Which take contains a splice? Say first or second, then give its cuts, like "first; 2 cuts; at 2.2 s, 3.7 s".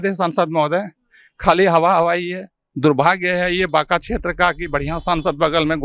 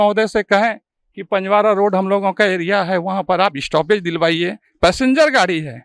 first; 1 cut; at 2.6 s